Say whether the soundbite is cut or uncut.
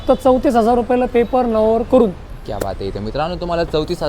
uncut